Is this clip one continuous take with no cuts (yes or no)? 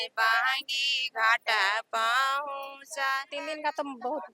no